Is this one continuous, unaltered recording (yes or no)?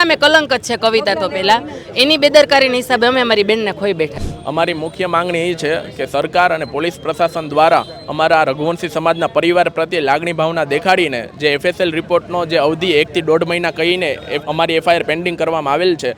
no